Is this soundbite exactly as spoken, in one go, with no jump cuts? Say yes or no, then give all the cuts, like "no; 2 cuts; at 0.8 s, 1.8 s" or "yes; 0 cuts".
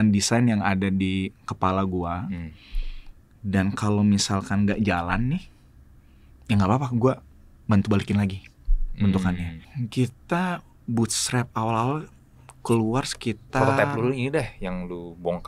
no; 1 cut; at 9.6 s